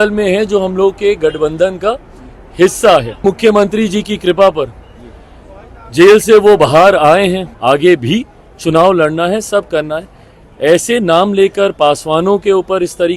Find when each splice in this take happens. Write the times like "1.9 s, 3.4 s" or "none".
3.2 s, 7.5 s